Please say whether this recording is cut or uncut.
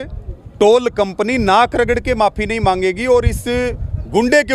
uncut